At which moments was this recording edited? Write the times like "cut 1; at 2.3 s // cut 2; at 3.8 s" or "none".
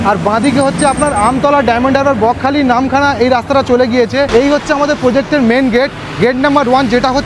cut 1; at 4.3 s